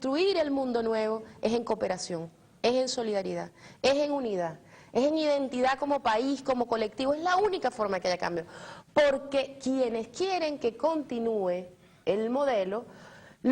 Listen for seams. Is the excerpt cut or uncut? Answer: cut